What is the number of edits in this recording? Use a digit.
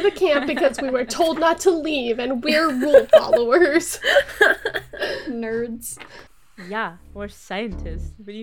0